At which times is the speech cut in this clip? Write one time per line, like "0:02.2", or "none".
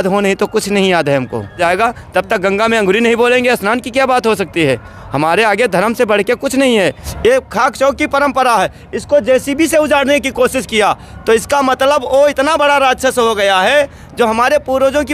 0:01.6
0:07.0